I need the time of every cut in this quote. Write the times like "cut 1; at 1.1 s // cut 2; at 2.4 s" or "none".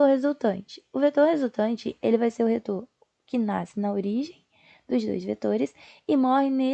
none